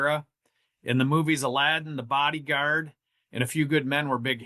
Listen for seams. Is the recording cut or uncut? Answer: uncut